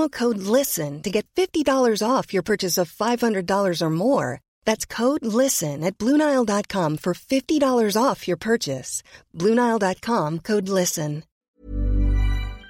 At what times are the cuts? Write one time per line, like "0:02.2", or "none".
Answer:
0:11.3